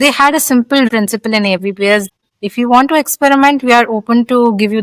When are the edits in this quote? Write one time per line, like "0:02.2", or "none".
0:00.9
0:02.1